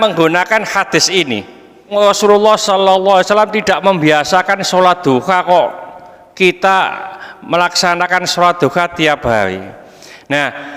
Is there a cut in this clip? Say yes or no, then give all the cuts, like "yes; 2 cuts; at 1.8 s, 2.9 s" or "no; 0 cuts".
yes; 1 cut; at 1.9 s